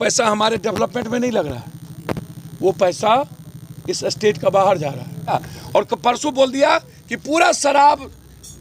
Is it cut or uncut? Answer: cut